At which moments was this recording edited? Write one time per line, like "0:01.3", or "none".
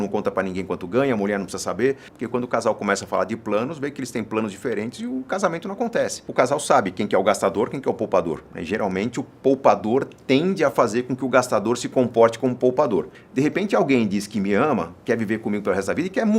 0:02.1
0:06.2
0:13.2